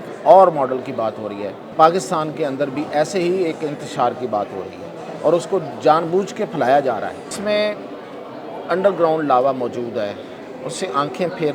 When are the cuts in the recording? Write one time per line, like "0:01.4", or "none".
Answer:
0:01.6
0:07.4